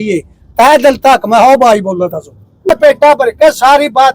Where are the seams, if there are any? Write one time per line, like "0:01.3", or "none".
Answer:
0:02.7